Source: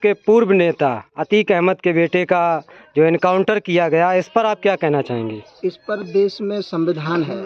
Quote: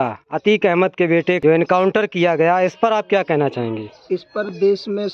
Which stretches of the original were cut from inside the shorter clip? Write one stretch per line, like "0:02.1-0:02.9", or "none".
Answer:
0:02.2-0:02.9